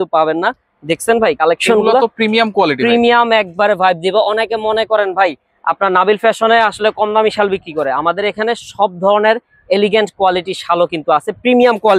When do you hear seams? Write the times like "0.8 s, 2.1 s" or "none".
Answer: none